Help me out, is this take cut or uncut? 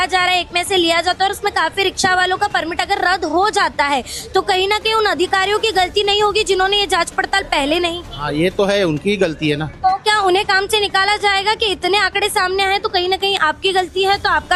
uncut